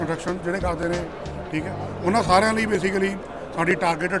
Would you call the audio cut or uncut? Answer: uncut